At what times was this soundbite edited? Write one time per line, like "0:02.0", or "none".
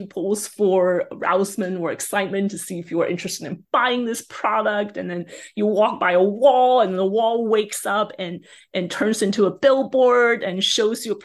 none